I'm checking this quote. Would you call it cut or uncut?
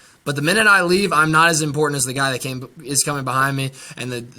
uncut